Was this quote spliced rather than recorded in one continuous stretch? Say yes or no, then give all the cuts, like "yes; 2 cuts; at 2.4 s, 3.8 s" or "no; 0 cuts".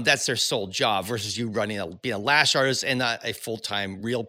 no; 0 cuts